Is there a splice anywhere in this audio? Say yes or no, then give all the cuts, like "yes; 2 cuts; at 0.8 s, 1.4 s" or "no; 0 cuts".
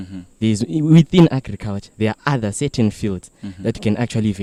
no; 0 cuts